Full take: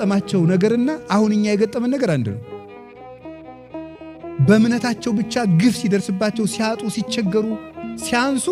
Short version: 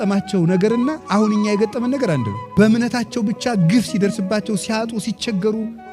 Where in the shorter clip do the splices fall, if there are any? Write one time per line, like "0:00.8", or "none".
0:02.4